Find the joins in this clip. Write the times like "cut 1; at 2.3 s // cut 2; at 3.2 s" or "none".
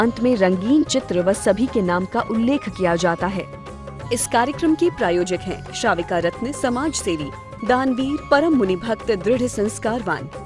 cut 1; at 3.4 s